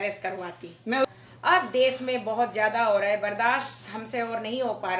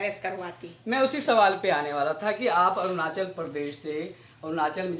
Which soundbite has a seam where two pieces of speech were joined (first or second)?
first